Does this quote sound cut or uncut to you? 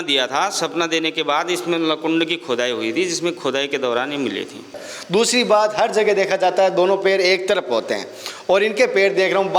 cut